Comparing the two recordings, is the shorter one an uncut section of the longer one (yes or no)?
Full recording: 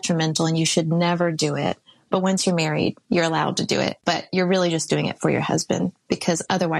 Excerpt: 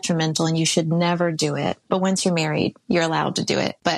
no